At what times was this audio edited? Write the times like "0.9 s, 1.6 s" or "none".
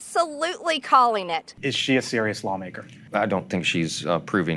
1.5 s, 3.0 s